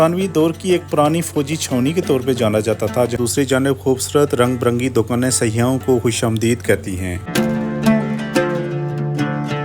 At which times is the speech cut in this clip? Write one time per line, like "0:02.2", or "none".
0:03.2
0:07.3